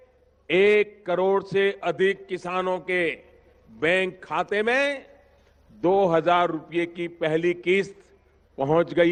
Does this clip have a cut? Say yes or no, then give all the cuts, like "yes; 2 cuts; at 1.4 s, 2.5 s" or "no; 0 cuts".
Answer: no; 0 cuts